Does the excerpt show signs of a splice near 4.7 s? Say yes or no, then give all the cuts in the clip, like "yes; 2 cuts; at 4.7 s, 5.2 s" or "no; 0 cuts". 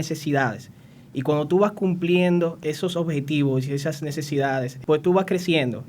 yes; 2 cuts; at 2.6 s, 4.7 s